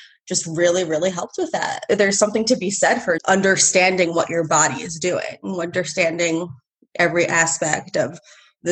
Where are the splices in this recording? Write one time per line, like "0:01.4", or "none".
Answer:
0:01.8
0:03.2